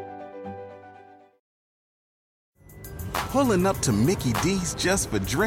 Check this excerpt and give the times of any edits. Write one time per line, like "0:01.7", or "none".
none